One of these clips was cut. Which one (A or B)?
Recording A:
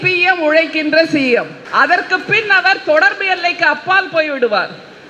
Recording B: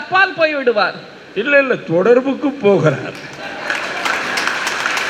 A